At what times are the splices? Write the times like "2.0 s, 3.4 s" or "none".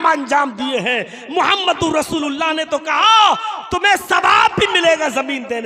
none